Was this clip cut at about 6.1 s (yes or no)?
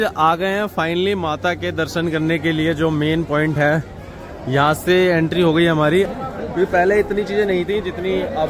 yes